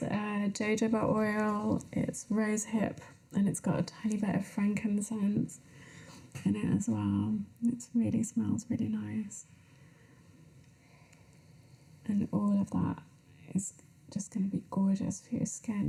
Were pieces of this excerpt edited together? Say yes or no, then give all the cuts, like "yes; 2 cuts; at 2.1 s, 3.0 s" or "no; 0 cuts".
no; 0 cuts